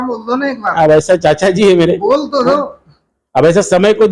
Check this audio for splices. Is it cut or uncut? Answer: uncut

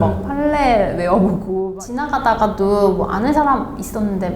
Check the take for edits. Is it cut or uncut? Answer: cut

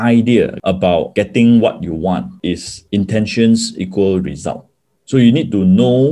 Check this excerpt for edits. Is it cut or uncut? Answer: uncut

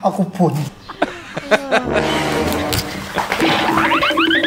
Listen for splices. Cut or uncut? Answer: uncut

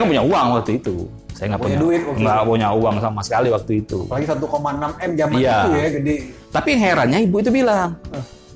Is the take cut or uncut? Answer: uncut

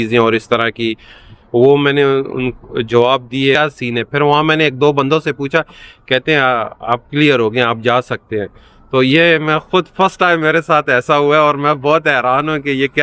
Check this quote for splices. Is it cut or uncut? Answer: cut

